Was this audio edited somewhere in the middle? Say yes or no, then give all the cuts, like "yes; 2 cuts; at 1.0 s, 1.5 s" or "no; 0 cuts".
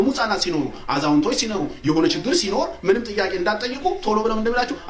no; 0 cuts